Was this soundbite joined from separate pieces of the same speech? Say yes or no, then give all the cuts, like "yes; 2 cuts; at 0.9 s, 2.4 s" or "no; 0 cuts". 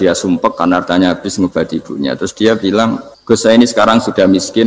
yes; 1 cut; at 3.1 s